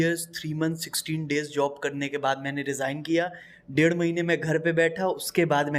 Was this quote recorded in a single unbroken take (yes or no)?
yes